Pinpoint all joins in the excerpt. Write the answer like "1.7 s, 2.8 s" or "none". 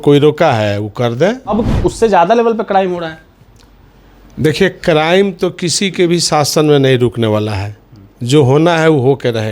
1.5 s